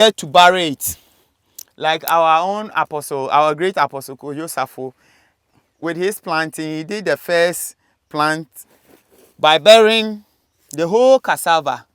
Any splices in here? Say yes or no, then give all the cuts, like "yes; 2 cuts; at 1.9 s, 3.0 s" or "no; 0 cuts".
no; 0 cuts